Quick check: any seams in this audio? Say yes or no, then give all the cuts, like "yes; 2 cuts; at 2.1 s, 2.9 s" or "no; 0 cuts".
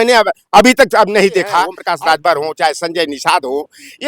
yes; 1 cut; at 1.8 s